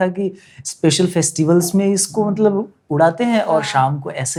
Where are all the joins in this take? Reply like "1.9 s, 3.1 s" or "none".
none